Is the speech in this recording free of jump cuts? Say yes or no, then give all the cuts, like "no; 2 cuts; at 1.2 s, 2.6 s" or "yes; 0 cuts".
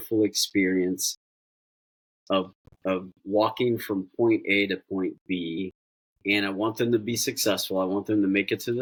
yes; 0 cuts